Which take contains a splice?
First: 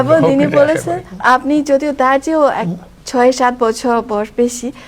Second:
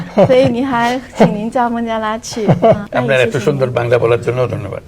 second; 1 cut; at 2.9 s

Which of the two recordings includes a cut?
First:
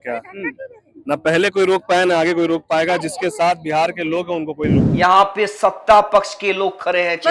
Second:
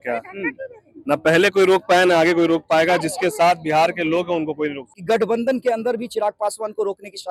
first; 1 cut; at 4.8 s

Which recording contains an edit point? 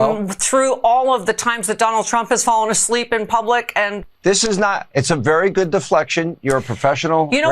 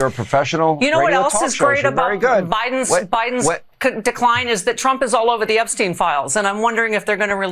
first; 1 cut; at 4.0 s

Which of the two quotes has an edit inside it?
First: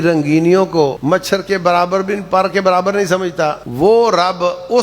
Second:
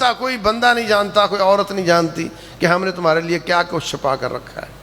first; 2 cuts; at 1.0 s, 3.6 s

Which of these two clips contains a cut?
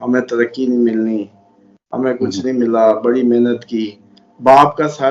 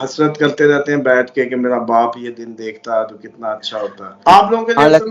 second; 1 cut; at 4.0 s

